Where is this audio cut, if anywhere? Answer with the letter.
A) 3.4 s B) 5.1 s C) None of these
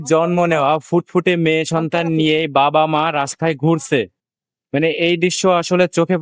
C